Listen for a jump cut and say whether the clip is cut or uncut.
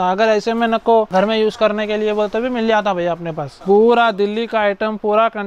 cut